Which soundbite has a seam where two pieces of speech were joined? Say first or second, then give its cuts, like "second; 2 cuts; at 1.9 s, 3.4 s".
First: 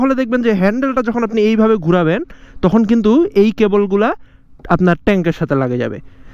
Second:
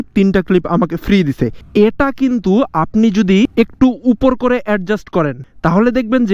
second; 3 cuts; at 1.6 s, 3.5 s, 5.4 s